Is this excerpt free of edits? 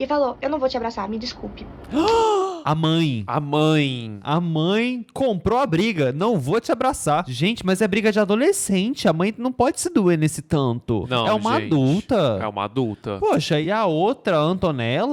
yes; 0 cuts

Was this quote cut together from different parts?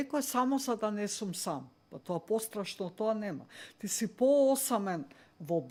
no; 0 cuts

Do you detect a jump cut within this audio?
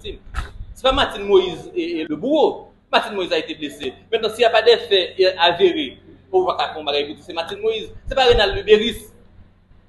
yes; 1 cut; at 2.0 s

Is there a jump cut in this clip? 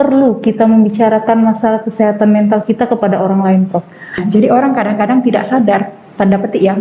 yes; 1 cut; at 4.2 s

